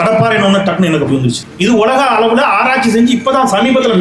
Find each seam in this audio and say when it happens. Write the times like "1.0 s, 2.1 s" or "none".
1.4 s